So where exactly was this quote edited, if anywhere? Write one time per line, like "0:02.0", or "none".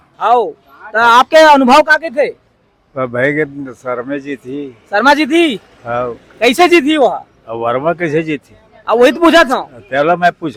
none